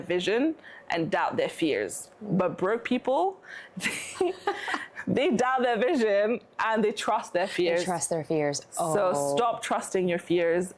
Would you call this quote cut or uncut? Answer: uncut